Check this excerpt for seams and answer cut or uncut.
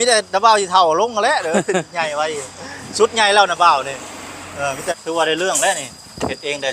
cut